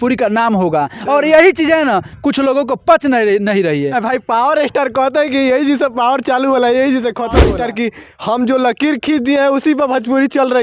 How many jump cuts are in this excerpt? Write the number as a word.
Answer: one